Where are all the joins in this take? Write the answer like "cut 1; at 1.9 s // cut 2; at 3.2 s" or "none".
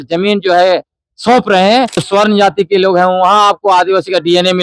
cut 1; at 2.0 s